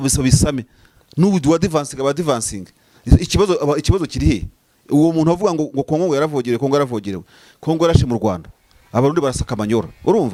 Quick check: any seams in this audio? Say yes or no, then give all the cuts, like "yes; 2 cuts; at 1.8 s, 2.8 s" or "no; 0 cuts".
no; 0 cuts